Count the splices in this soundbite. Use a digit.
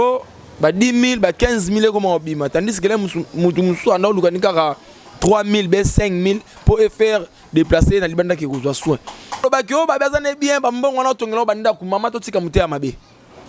1